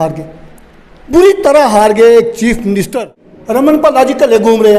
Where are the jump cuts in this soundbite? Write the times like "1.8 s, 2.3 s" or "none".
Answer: 3.6 s